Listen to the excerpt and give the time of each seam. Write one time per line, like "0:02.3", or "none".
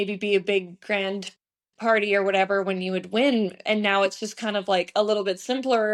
none